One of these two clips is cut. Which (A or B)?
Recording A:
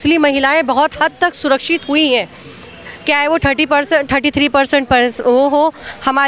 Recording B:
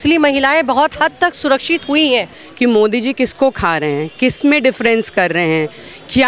B